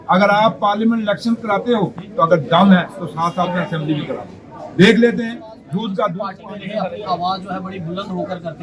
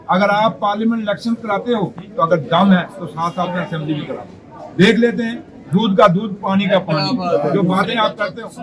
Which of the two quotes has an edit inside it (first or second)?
first